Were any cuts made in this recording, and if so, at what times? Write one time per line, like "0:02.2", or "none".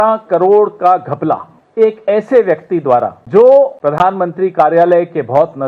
0:01.6
0:03.2
0:03.8